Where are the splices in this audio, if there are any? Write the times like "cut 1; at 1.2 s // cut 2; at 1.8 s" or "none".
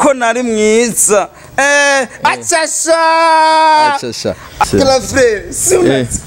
cut 1; at 4.7 s